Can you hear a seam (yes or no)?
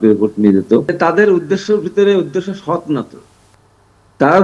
yes